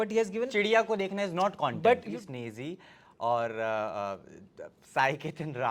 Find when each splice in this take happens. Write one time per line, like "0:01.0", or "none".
0:02.1